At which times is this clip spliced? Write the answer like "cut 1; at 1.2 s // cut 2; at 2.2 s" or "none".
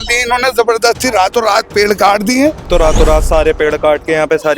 cut 1; at 2.7 s